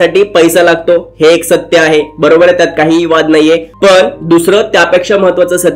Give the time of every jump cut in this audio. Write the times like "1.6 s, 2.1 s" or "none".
none